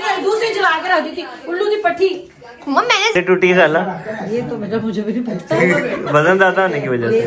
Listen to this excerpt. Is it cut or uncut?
cut